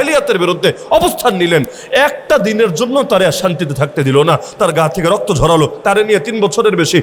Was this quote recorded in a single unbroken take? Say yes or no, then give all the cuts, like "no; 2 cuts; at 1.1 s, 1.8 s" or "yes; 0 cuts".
yes; 0 cuts